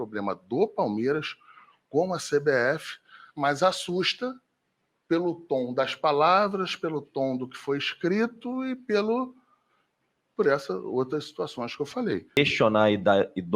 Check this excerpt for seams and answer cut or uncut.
cut